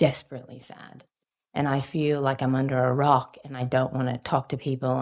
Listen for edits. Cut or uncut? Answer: uncut